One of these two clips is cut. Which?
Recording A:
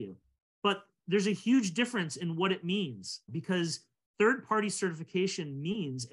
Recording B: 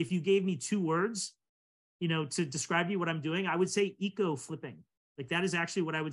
A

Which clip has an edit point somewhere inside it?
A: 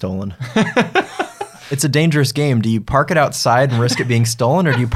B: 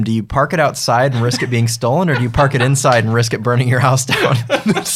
A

